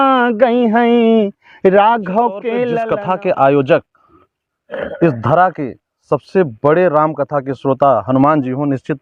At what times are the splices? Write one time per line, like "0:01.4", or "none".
0:02.7